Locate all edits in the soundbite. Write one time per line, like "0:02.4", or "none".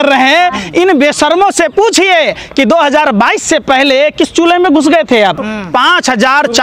0:05.5